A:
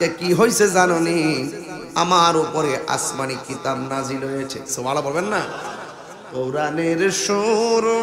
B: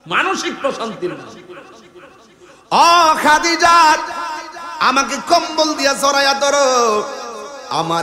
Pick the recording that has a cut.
A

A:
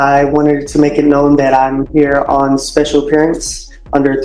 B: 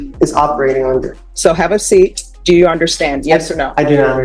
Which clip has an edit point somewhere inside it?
B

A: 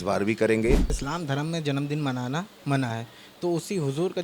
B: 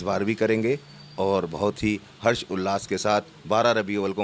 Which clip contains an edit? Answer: A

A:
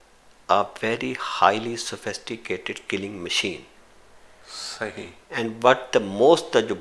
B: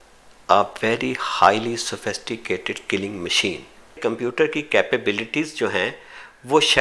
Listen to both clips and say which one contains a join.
B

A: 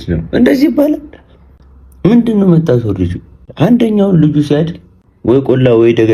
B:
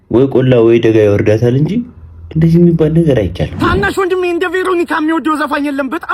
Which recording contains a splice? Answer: B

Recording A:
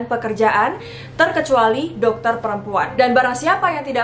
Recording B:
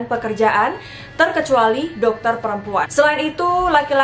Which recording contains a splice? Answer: B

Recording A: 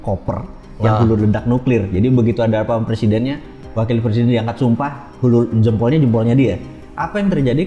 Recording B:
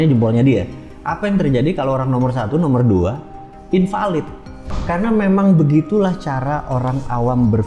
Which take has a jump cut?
B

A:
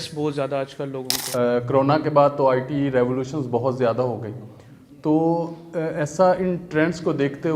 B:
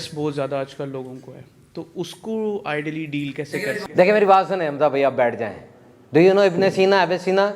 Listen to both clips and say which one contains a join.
A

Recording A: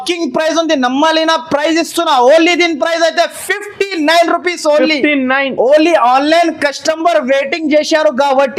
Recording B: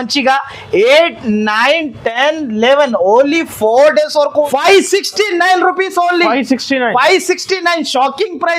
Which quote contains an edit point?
B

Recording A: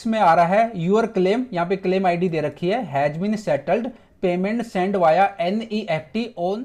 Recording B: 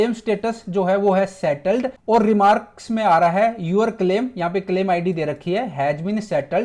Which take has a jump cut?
B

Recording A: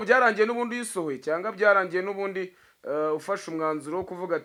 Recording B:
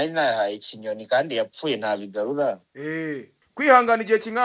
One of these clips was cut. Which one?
B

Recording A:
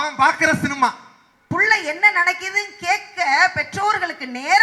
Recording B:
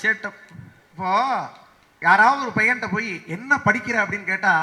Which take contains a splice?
A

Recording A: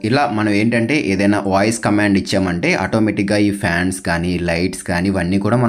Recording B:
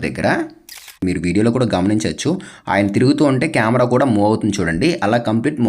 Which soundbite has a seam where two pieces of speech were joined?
B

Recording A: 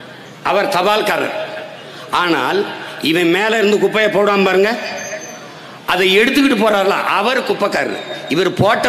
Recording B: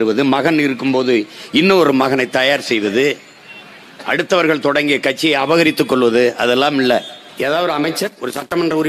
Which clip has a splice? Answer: B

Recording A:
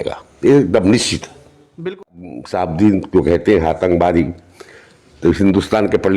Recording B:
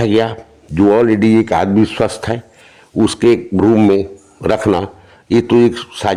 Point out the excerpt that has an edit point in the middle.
A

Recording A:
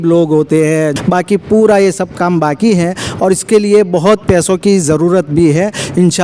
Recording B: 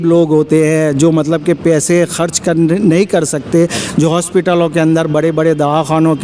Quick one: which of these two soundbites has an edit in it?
A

